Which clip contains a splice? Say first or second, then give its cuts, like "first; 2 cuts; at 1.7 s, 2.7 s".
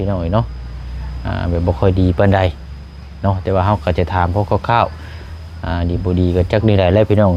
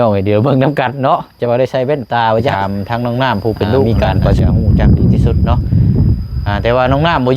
second; 1 cut; at 2.5 s